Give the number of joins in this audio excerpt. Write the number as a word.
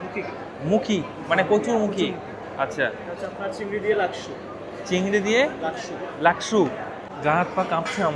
one